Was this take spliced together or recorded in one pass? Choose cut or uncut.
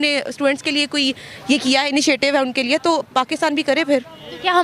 uncut